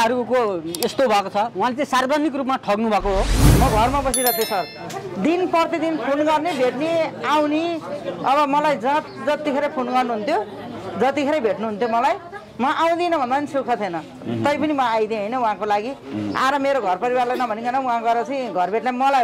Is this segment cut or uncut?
cut